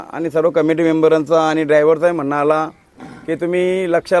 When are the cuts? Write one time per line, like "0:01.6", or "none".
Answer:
none